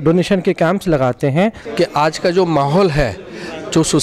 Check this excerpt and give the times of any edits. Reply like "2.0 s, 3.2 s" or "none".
1.6 s